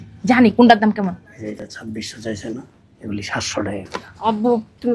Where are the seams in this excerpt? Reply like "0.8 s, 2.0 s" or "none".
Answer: none